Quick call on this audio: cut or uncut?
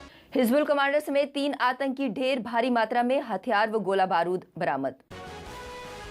cut